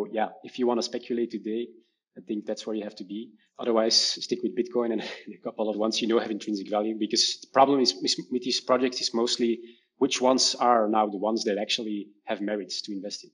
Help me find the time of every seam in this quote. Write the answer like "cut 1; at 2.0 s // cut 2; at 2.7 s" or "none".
cut 1; at 3.4 s // cut 2; at 5.8 s